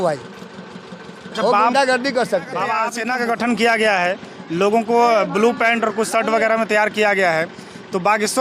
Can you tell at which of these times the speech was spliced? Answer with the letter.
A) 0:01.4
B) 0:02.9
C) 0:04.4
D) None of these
B